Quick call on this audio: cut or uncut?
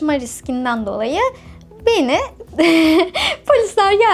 uncut